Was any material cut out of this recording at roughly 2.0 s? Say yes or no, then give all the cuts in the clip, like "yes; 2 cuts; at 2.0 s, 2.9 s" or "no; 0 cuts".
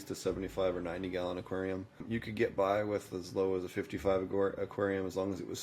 yes; 1 cut; at 2.0 s